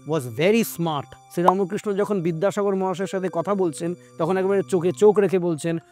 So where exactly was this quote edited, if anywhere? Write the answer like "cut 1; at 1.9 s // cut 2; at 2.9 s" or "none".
cut 1; at 1.2 s